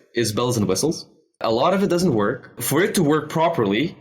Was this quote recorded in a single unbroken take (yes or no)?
no